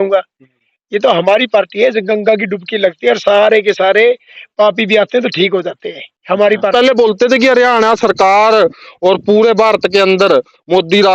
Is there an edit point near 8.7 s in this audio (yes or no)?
no